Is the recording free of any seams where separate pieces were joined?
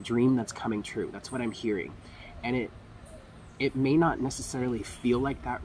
yes; 0 cuts

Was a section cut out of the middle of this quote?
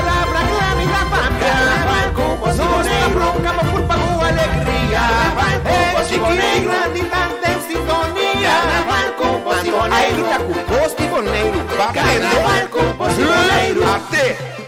no; 0 cuts

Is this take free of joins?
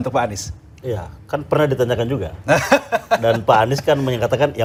yes; 0 cuts

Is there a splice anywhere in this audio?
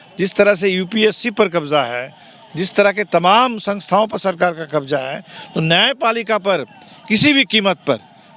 no; 0 cuts

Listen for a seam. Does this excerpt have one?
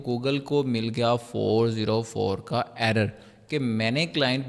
no; 0 cuts

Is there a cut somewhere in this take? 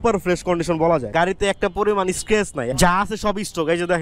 yes; 2 cuts; at 1.1 s, 2.7 s

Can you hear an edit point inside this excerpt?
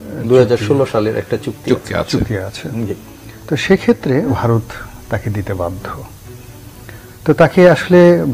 yes; 1 cut; at 4.3 s

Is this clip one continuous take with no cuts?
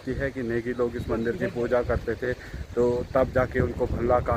yes; 0 cuts

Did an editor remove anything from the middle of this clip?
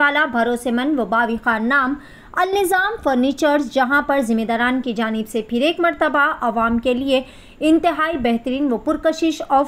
no; 0 cuts

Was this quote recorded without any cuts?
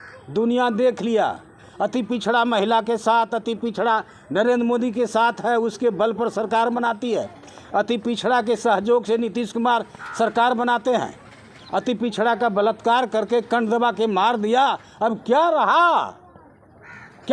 yes; 0 cuts

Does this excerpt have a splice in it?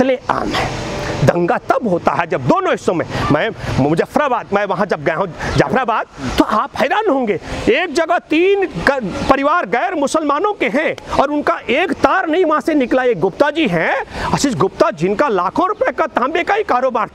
no; 0 cuts

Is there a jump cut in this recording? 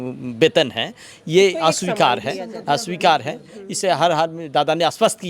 no; 0 cuts

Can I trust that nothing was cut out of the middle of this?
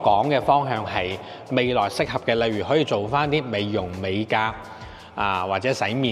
yes; 0 cuts

